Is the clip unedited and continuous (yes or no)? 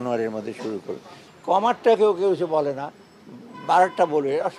no